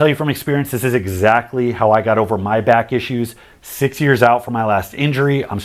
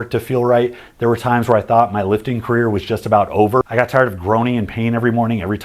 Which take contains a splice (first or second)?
second